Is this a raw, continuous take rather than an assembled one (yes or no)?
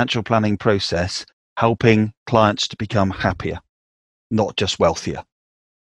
yes